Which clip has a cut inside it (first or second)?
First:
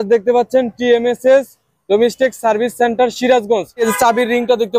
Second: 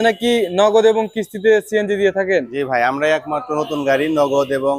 first